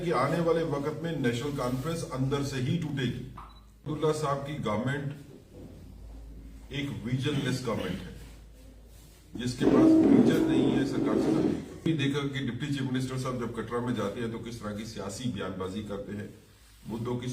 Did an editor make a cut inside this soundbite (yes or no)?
yes